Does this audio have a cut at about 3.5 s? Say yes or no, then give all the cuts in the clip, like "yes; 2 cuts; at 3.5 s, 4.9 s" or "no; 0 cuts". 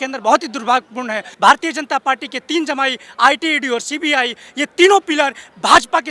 no; 1 cut; at 1.3 s